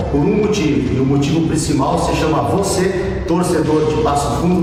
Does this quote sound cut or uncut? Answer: uncut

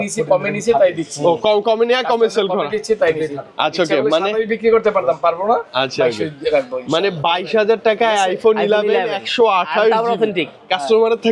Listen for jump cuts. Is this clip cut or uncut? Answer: uncut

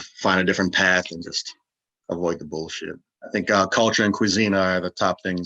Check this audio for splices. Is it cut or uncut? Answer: cut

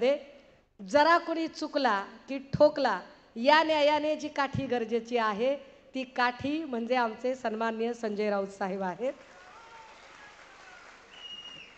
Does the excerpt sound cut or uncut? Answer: uncut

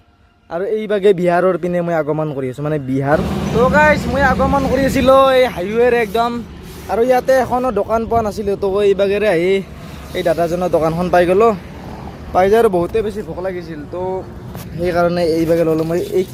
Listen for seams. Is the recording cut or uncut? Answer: cut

